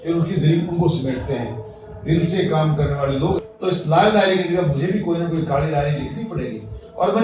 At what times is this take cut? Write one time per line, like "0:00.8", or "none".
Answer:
0:03.4